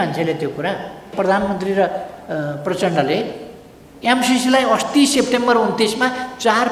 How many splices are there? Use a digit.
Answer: 1